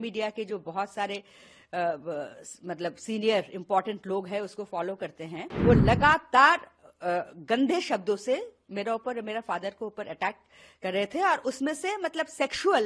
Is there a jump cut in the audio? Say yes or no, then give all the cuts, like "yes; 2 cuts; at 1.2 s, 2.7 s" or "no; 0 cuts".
yes; 1 cut; at 5.5 s